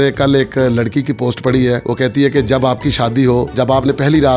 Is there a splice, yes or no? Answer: no